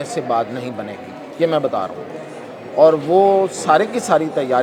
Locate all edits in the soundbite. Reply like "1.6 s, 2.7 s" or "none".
none

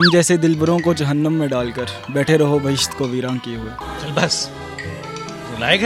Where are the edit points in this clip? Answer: none

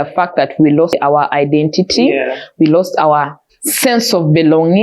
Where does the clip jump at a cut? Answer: 0.9 s

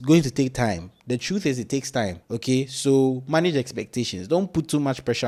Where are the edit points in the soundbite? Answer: none

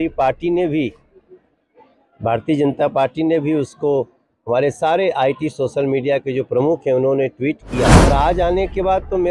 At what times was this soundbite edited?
8.0 s

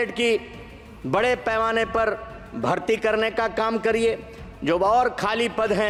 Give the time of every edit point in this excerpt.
none

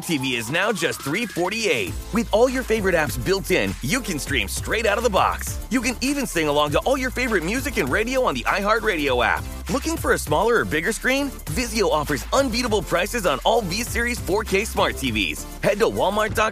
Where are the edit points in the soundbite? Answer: none

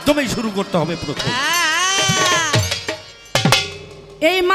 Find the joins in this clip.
3.1 s

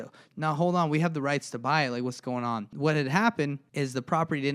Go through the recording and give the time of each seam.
2.7 s, 3.6 s

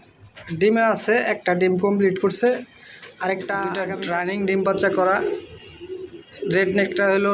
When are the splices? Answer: 3.8 s

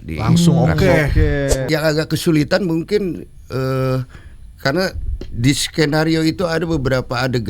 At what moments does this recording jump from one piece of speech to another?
1.6 s

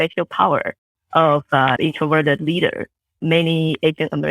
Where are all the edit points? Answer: 1.8 s, 3.2 s

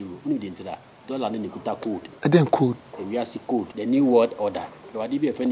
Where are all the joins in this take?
2.1 s, 3.7 s

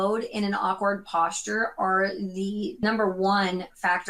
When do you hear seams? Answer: 2.8 s

